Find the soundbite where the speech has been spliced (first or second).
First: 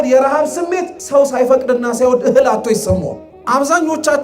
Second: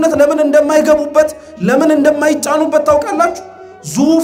first